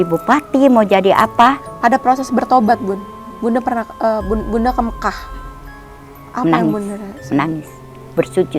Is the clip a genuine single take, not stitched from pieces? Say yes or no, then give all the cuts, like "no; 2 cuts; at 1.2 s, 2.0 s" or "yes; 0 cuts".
no; 1 cut; at 1.7 s